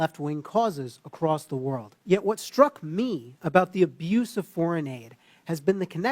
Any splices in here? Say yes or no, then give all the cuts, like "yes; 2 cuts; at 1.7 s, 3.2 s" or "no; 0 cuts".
yes; 1 cut; at 1.9 s